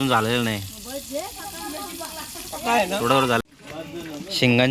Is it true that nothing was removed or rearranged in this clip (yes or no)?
no